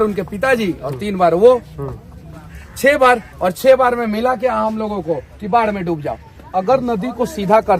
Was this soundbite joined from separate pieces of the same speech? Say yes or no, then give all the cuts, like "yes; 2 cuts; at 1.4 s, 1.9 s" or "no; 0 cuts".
yes; 1 cut; at 6.5 s